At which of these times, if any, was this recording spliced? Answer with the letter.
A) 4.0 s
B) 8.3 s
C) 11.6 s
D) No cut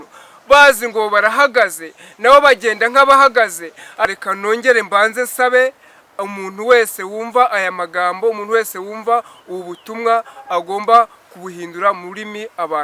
A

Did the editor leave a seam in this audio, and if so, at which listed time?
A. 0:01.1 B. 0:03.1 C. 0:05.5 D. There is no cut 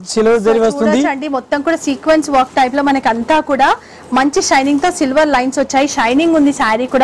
D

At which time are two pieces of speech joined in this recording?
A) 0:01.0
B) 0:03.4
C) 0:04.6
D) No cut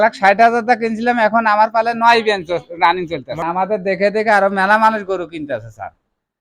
B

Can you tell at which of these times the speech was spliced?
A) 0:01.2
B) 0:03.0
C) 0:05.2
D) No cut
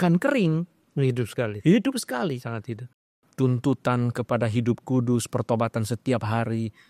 B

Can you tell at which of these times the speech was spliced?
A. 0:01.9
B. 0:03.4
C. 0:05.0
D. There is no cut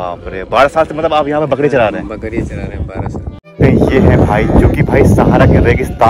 B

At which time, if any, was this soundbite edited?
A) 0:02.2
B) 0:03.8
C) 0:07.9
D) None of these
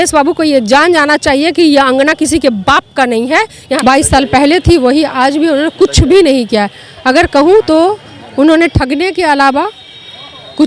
B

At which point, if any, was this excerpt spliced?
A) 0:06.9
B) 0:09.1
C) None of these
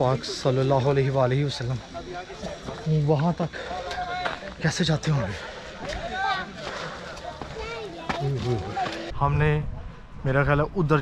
B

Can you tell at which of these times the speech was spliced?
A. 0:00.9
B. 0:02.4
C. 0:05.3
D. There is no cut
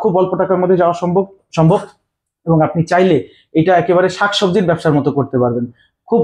D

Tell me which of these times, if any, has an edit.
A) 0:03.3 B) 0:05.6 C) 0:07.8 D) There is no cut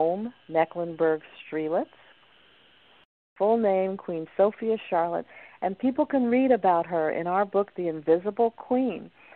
A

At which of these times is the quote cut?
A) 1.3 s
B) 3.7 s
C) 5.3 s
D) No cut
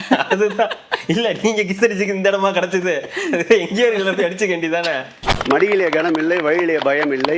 C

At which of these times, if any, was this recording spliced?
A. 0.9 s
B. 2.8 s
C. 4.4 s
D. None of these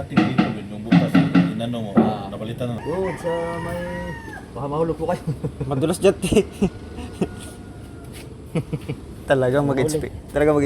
B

